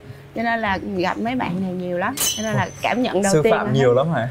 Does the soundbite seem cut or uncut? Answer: uncut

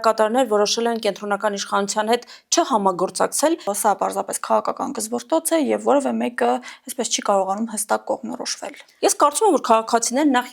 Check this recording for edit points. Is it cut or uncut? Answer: cut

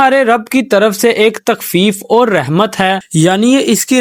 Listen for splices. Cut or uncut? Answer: uncut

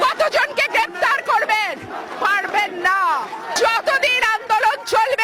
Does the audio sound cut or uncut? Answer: cut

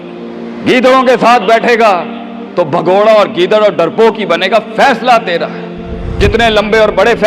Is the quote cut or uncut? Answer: cut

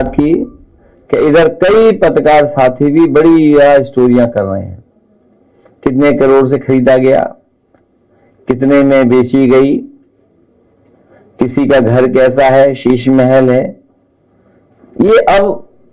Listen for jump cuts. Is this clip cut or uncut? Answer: uncut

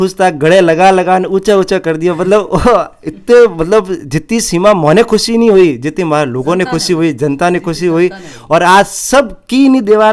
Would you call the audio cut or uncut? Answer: uncut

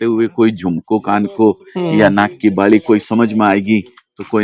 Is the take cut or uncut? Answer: uncut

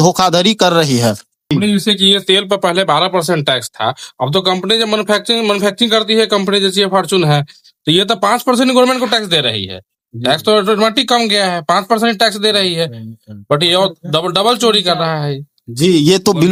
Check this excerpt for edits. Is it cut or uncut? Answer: uncut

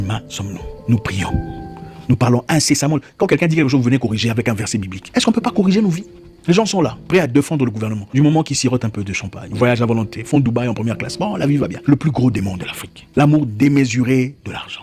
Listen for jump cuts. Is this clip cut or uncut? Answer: uncut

